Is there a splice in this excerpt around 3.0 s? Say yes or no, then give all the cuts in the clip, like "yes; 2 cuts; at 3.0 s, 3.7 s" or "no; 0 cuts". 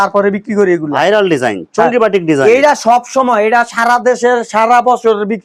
no; 0 cuts